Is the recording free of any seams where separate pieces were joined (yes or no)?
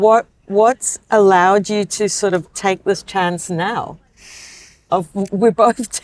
yes